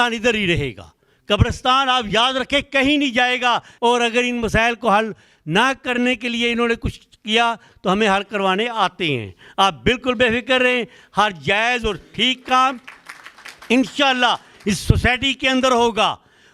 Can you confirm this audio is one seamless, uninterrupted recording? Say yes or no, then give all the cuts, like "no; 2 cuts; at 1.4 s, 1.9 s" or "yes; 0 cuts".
no; 1 cut; at 3.7 s